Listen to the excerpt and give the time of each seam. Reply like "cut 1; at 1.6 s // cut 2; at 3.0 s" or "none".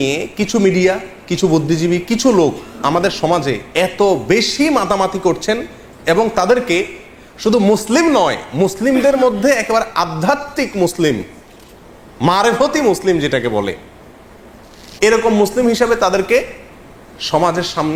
none